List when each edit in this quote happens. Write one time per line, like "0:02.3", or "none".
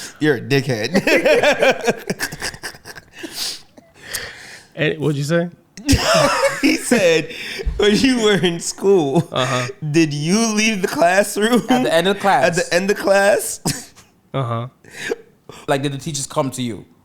0:15.6